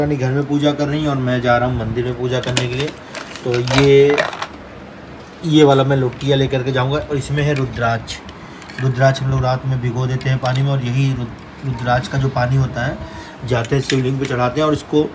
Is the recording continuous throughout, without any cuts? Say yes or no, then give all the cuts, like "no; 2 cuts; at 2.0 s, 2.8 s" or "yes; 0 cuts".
yes; 0 cuts